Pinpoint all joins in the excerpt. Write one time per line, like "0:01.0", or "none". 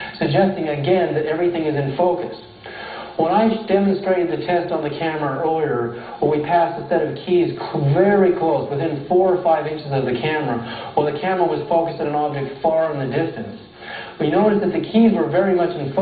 0:04.2